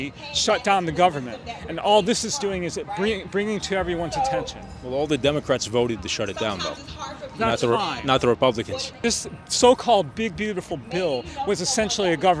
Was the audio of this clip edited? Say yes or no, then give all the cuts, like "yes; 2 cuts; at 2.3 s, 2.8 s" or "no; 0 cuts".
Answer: yes; 1 cut; at 8.8 s